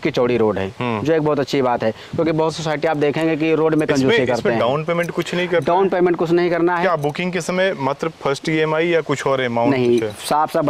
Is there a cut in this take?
no; 0 cuts

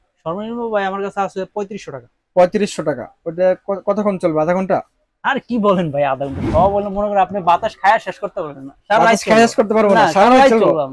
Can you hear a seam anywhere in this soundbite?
no; 0 cuts

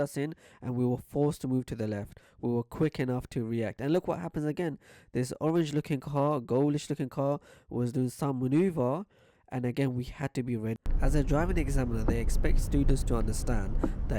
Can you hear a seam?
yes; 1 cut; at 10.8 s

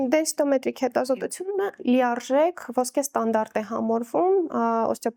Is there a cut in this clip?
no; 0 cuts

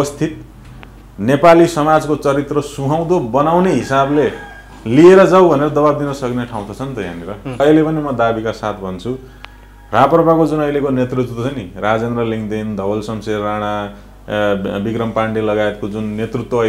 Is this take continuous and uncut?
no; 1 cut; at 7.6 s

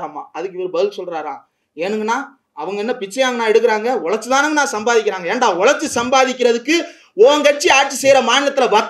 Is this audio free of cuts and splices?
yes; 0 cuts

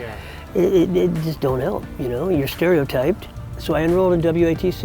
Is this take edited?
yes; 1 cut; at 3.5 s

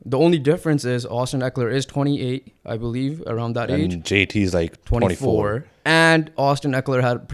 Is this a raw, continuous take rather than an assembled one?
yes; 0 cuts

